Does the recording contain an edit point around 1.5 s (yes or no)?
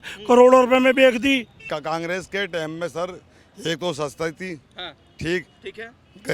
yes